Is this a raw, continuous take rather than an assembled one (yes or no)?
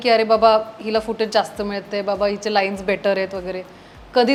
yes